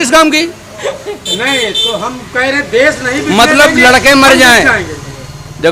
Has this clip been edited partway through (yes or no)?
no